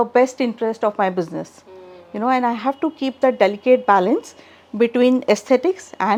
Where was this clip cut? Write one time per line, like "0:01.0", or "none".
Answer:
none